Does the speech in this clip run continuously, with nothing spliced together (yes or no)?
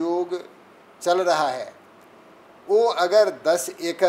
yes